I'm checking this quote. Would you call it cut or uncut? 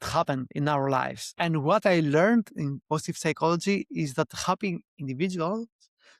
cut